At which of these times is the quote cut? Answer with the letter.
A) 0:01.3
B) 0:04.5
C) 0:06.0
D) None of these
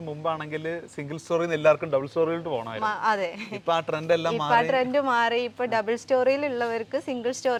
D